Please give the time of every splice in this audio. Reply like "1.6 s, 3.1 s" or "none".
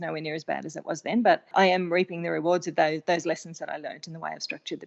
1.5 s